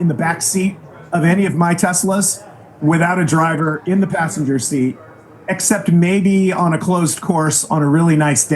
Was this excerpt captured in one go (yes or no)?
yes